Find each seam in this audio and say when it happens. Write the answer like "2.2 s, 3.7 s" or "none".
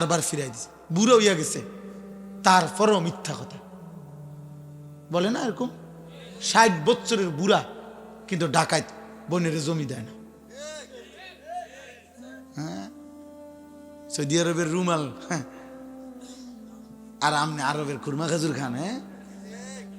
19.0 s